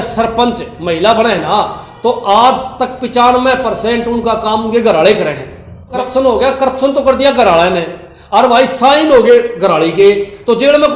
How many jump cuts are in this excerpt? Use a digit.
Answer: 1